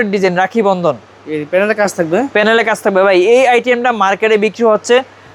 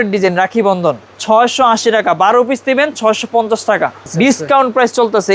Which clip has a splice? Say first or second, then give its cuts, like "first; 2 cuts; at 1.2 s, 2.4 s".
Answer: second; 2 cuts; at 1.1 s, 4.0 s